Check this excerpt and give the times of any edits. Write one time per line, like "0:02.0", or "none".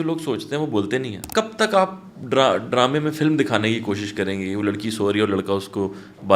0:01.2

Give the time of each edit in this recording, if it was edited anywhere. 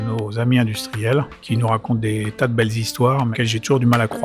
0:01.4
0:03.3

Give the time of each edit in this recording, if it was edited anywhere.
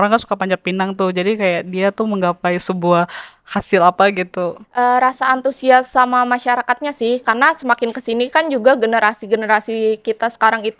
0:04.6

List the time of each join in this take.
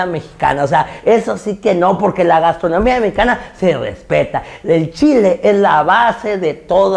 none

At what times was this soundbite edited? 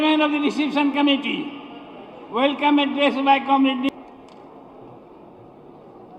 0:03.9

